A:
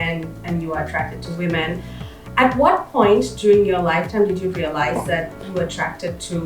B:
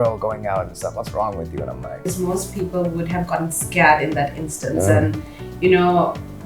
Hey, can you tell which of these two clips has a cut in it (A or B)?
B